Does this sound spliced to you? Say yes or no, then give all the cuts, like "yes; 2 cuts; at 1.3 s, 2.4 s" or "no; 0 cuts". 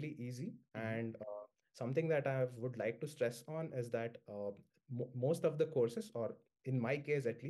no; 0 cuts